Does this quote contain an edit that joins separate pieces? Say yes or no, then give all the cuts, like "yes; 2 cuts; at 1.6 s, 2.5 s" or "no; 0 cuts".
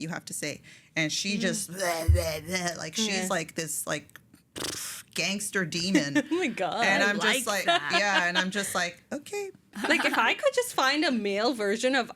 yes; 1 cut; at 9.7 s